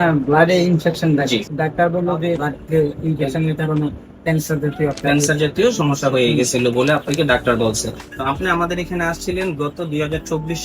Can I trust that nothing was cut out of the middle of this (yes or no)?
no